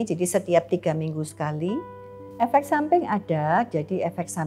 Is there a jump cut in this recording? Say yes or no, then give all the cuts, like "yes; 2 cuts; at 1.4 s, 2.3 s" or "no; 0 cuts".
yes; 1 cut; at 2.2 s